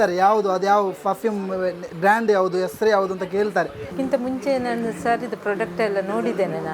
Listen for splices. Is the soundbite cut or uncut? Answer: cut